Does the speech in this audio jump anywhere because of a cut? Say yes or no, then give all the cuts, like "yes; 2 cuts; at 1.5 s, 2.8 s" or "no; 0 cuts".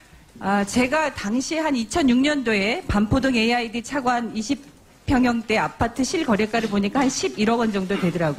no; 0 cuts